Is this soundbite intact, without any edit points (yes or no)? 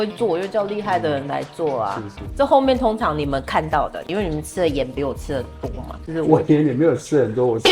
no